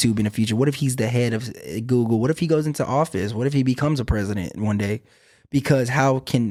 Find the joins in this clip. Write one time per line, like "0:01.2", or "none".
none